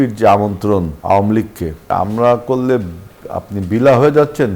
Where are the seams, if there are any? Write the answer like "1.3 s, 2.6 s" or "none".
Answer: 0.9 s, 1.9 s